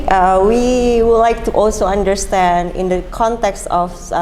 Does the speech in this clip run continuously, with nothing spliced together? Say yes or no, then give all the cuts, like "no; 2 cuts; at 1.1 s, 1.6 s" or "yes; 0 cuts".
yes; 0 cuts